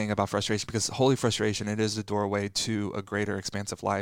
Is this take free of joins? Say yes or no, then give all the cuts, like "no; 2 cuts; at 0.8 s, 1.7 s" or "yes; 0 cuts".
yes; 0 cuts